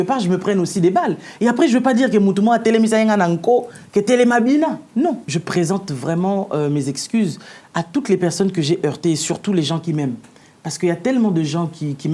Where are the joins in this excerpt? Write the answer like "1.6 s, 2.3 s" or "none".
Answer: 5.3 s